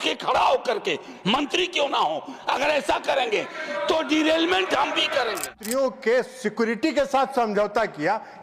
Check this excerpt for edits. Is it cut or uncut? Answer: cut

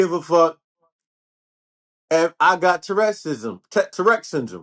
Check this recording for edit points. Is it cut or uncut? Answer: uncut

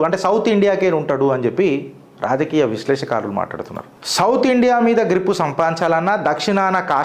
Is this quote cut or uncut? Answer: uncut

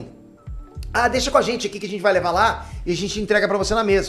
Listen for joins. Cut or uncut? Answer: uncut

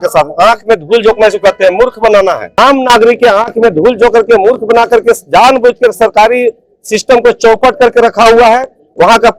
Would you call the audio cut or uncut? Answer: cut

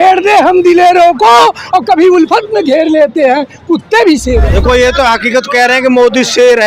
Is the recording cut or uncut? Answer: cut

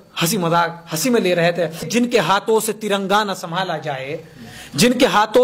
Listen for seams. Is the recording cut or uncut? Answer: cut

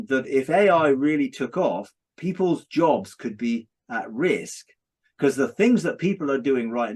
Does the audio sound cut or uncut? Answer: uncut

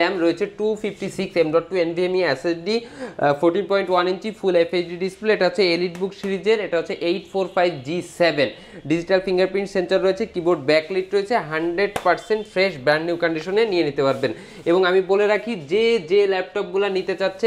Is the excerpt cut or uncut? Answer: uncut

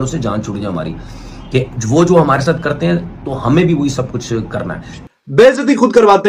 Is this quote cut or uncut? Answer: cut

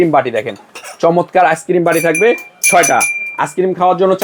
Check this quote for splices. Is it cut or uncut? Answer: uncut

